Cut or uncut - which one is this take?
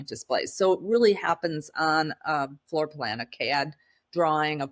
uncut